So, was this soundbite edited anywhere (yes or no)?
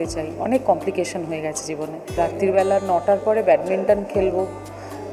yes